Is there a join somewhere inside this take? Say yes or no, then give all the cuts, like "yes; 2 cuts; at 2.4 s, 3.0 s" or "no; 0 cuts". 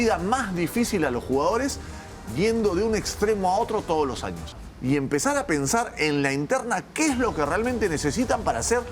yes; 1 cut; at 4.6 s